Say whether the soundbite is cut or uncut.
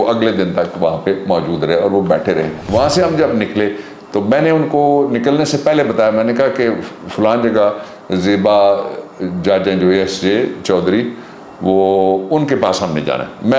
cut